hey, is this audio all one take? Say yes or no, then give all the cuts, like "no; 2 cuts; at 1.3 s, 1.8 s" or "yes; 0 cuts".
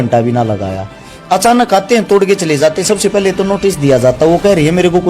yes; 0 cuts